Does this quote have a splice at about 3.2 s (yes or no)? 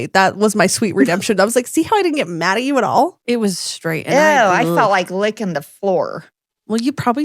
yes